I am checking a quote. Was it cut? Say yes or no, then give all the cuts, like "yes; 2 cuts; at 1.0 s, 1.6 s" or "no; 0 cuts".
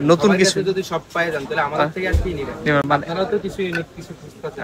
no; 0 cuts